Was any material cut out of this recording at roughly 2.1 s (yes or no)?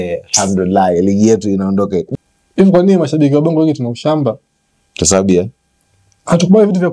yes